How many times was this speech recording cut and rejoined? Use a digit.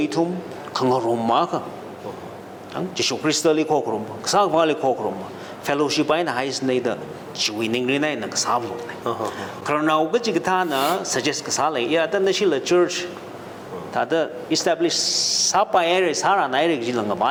0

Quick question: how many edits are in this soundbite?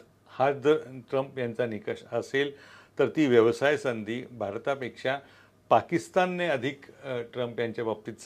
0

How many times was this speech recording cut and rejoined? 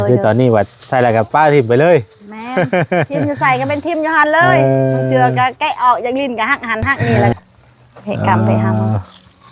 1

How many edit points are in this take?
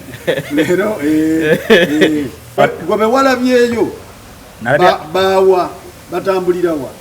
1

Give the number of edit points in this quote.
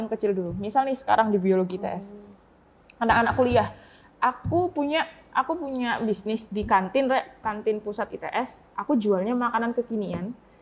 0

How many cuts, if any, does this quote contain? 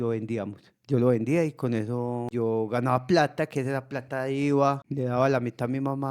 2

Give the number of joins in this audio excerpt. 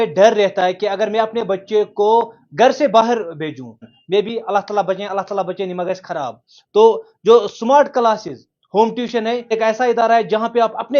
2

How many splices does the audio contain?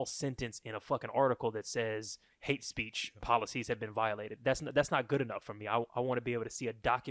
1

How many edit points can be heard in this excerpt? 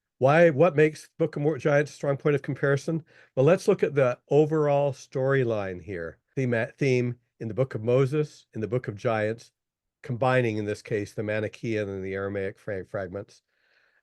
1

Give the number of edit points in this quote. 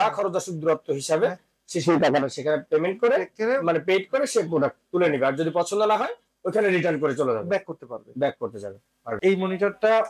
1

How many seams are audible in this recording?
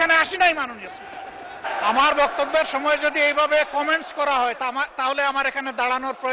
1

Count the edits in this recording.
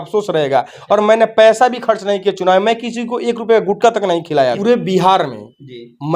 1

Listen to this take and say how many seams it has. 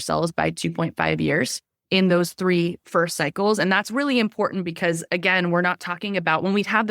1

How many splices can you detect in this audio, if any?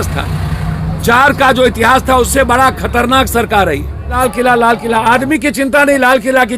1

